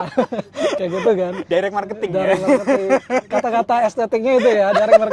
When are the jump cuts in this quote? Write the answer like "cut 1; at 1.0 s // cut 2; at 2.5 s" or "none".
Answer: none